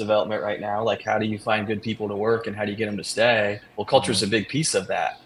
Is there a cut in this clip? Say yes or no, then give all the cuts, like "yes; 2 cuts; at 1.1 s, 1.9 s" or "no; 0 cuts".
no; 0 cuts